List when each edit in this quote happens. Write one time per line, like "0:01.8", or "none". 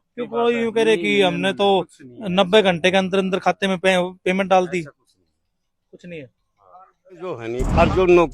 0:07.4